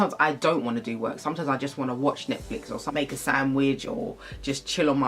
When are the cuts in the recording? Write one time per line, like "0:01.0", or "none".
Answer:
none

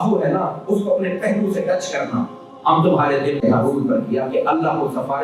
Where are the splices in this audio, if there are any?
0:03.4

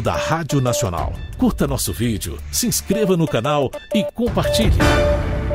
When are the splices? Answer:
0:01.2
0:04.4

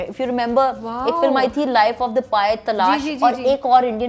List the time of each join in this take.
none

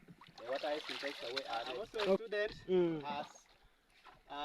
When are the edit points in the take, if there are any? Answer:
0:02.2

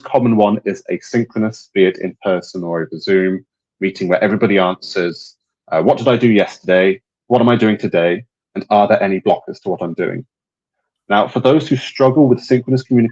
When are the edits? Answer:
none

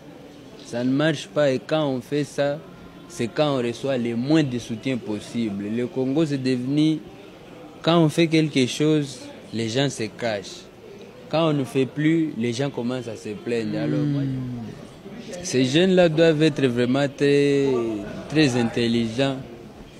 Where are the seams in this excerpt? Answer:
0:13.9

